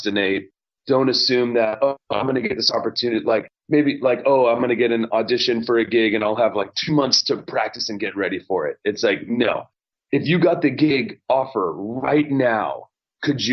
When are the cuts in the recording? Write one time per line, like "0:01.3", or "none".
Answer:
none